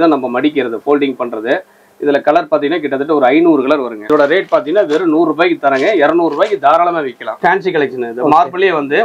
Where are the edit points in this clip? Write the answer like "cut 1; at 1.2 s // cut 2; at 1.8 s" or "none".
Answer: cut 1; at 4.0 s // cut 2; at 7.2 s